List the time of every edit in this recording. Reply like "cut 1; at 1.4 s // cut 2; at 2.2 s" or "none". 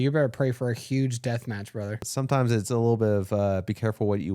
cut 1; at 2.0 s